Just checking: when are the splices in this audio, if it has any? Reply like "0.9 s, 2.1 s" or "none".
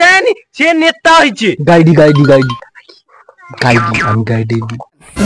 none